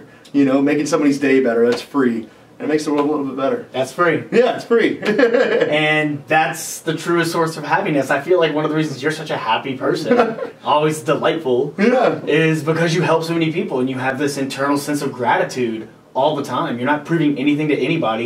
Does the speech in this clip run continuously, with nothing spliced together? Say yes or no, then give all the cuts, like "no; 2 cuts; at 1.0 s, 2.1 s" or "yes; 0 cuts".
yes; 0 cuts